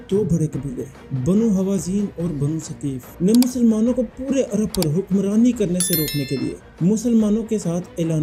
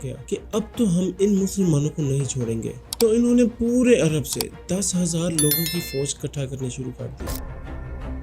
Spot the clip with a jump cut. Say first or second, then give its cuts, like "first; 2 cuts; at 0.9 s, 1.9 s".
second; 1 cut; at 7.2 s